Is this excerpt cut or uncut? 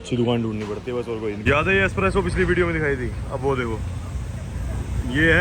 cut